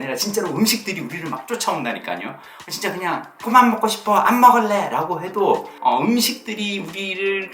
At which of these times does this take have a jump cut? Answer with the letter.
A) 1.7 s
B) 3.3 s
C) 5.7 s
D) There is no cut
C